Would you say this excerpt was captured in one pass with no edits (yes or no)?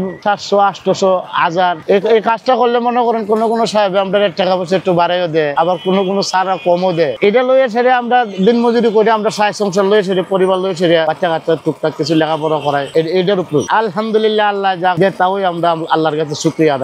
no